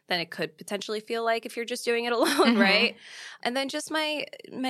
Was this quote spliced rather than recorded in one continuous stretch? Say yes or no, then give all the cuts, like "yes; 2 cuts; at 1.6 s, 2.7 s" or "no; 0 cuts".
yes; 1 cut; at 3.4 s